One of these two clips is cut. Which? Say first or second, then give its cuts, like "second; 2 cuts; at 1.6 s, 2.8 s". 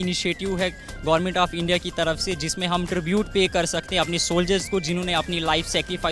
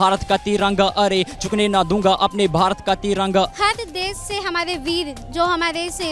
second; 1 cut; at 3.5 s